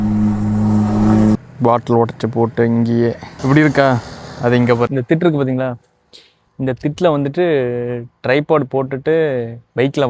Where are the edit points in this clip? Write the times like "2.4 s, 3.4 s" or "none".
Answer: 1.3 s, 4.9 s